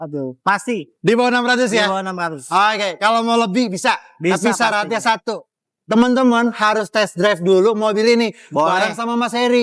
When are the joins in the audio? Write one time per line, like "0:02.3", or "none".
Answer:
none

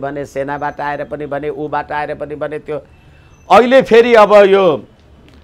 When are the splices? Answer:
none

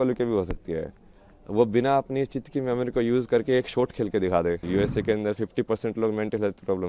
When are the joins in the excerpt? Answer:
0:04.6

